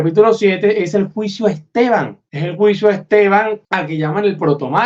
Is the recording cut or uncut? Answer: cut